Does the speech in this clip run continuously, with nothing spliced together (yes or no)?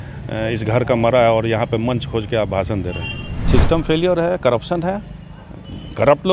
no